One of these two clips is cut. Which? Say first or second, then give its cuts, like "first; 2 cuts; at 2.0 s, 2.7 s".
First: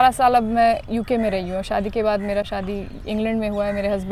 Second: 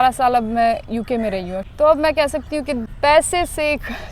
second; 2 cuts; at 1.6 s, 2.9 s